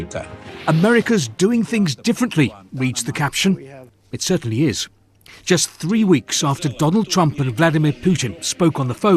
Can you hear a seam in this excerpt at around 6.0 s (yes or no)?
no